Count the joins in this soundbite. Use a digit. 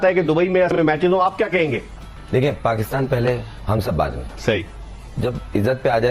1